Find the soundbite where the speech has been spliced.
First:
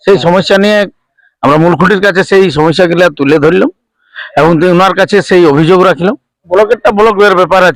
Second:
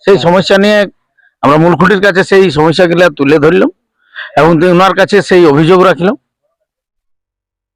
first; 1 cut; at 6.4 s

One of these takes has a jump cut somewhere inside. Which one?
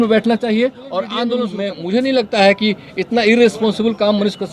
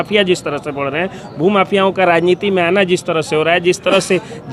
first; 1 cut; at 1.5 s

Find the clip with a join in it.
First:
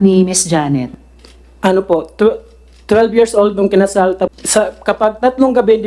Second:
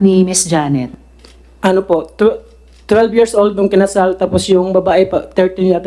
first; 1 cut; at 4.3 s

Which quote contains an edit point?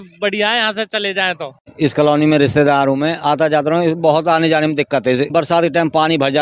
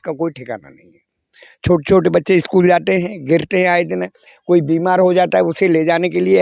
first; 2 cuts; at 1.7 s, 5.3 s

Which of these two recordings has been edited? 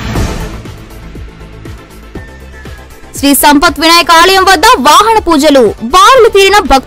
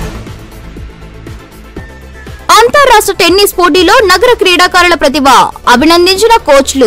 first; 1 cut; at 2.7 s

